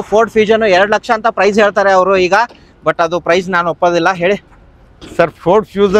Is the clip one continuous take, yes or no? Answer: yes